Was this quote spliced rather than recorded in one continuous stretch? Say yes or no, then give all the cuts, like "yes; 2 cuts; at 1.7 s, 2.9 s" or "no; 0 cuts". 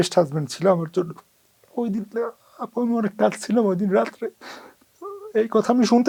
no; 0 cuts